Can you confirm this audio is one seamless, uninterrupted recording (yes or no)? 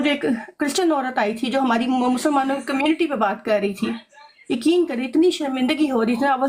yes